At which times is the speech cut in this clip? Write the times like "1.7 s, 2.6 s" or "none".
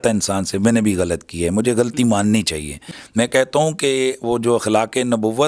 2.8 s

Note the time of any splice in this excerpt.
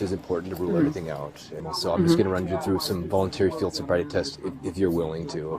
1.6 s

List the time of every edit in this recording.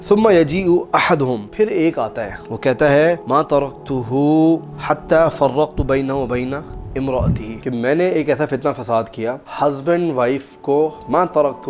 7.6 s

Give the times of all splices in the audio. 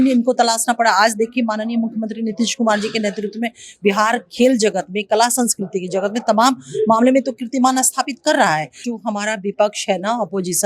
8.8 s

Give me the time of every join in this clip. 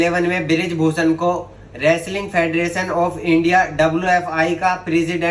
none

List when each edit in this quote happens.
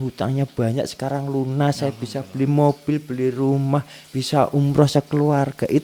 none

